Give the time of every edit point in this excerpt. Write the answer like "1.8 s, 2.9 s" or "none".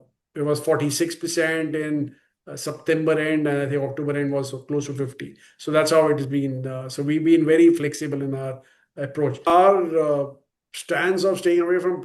9.4 s

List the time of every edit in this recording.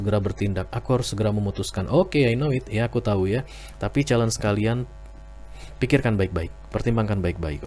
none

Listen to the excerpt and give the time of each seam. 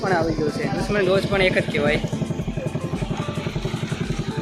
none

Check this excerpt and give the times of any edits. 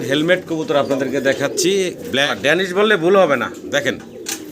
2.3 s

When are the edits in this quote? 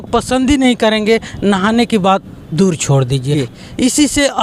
3.5 s

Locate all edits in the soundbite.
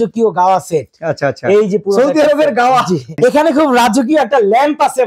3.1 s

